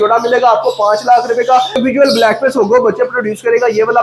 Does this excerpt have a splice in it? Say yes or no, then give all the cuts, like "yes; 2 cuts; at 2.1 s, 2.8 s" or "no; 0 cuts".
yes; 1 cut; at 1.8 s